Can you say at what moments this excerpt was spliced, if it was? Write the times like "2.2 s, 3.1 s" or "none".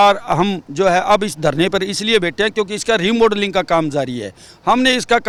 none